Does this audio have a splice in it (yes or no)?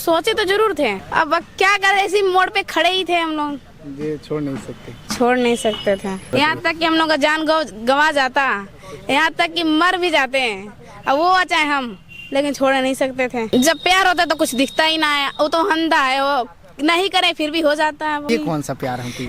yes